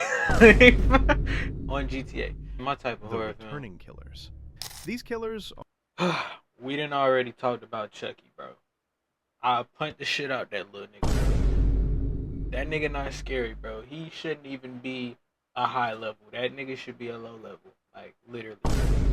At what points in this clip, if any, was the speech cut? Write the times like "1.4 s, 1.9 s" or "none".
2.5 s